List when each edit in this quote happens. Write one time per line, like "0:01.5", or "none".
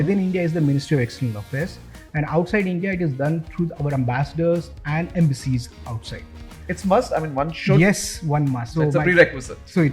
0:06.5
0:08.6